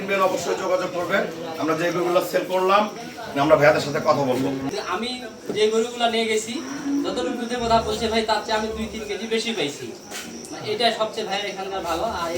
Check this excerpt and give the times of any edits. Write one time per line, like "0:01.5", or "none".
0:04.7